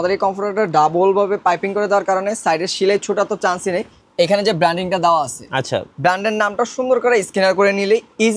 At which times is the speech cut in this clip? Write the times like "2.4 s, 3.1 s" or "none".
4.0 s